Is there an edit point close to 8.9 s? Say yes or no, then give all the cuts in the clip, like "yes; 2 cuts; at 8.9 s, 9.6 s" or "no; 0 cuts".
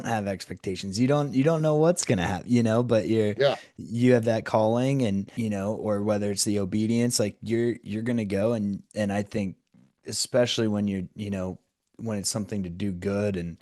yes; 2 cuts; at 5.3 s, 8.9 s